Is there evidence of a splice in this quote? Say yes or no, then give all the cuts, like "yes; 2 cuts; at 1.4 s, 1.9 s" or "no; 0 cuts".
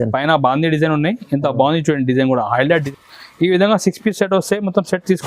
yes; 1 cut; at 2.7 s